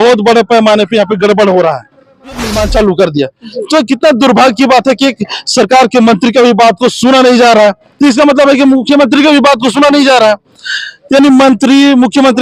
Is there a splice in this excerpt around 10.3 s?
no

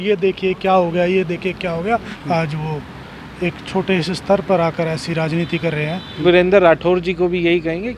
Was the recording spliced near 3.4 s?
no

